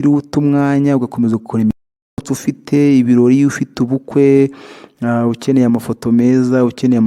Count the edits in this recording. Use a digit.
1